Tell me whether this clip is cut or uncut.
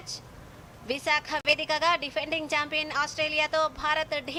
uncut